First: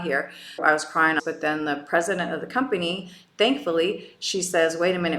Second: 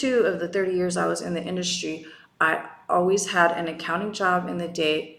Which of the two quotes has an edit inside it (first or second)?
first